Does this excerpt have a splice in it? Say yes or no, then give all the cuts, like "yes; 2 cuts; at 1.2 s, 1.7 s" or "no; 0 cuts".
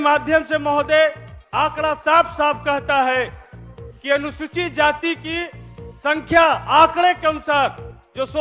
no; 0 cuts